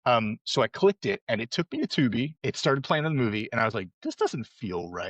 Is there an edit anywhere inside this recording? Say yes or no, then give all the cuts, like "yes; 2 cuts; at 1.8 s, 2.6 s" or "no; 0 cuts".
yes; 1 cut; at 2.4 s